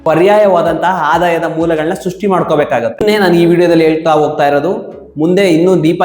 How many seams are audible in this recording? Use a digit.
1